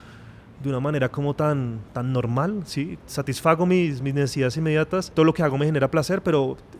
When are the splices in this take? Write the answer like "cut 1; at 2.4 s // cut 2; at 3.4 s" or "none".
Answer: cut 1; at 3.0 s // cut 2; at 5.1 s